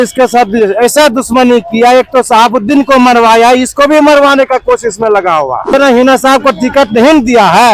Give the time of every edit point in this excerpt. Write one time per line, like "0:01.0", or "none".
0:05.7